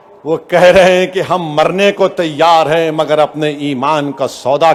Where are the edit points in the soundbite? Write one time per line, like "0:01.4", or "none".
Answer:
none